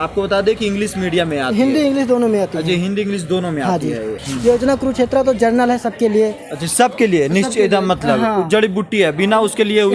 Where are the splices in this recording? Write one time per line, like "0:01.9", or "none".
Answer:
0:04.3